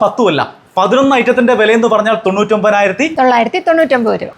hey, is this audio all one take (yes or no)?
no